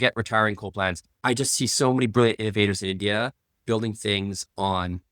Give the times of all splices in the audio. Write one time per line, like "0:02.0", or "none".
0:01.1